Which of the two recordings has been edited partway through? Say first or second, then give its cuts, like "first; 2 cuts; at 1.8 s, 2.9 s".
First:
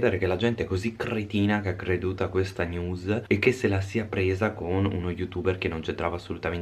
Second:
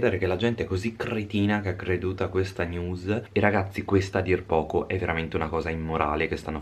second; 1 cut; at 3.2 s